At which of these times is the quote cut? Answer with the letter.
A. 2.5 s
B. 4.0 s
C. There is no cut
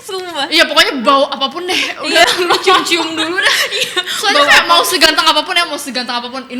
C